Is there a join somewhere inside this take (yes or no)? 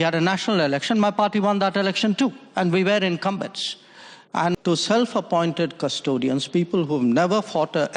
yes